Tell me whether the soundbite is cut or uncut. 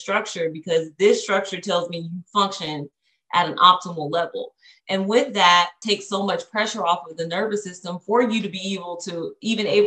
cut